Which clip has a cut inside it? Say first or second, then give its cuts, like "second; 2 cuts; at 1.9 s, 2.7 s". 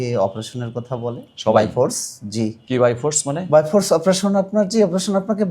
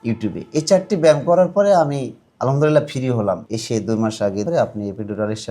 second; 2 cuts; at 3.5 s, 4.4 s